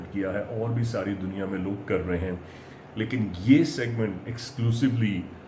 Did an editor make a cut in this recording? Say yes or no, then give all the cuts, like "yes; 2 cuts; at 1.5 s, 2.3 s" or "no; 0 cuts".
no; 0 cuts